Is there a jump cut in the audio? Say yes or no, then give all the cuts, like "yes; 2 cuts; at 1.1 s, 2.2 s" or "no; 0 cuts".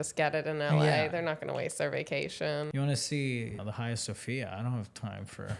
yes; 2 cuts; at 2.7 s, 3.6 s